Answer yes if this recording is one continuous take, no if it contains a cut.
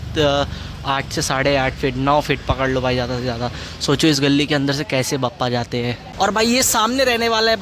no